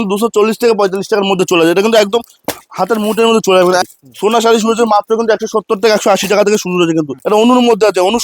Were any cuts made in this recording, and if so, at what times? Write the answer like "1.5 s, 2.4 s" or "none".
3.9 s, 7.2 s